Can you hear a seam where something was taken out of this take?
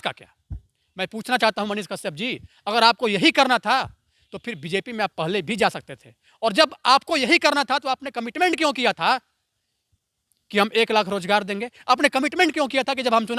no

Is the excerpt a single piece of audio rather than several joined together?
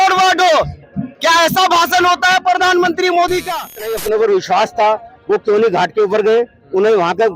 no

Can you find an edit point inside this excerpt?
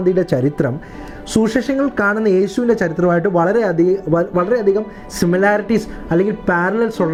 no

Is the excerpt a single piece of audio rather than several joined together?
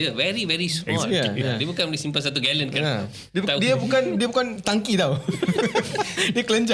yes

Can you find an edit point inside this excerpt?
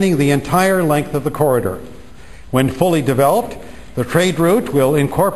yes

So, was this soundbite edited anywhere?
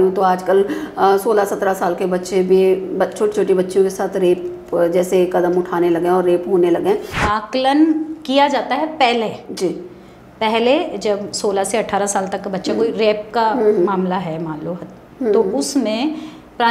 yes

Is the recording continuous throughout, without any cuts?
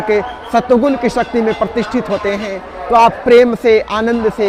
yes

